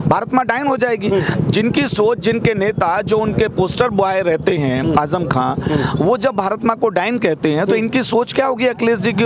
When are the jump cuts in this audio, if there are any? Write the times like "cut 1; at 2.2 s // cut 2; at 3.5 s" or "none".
none